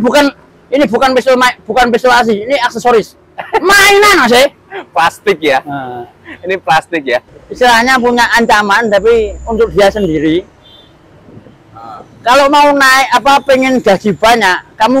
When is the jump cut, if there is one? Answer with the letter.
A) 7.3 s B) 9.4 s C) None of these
A